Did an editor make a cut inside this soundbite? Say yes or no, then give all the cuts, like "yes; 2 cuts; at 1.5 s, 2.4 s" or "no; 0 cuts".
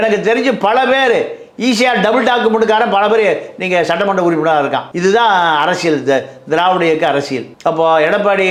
no; 0 cuts